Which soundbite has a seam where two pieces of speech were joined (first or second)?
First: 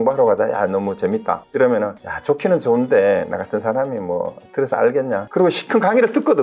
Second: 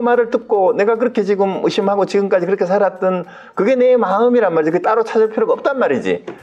first